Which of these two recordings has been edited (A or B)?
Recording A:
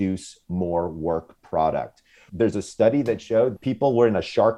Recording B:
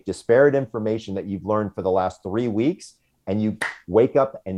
A